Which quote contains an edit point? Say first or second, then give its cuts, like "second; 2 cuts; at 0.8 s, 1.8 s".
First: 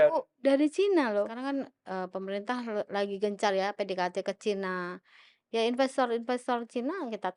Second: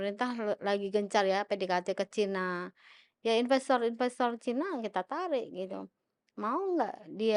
first; 1 cut; at 1.4 s